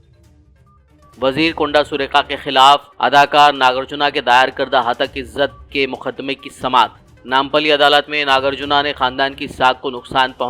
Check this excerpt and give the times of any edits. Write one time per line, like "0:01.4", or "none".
0:01.0